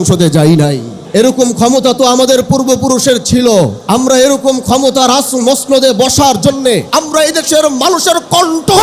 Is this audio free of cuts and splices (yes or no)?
no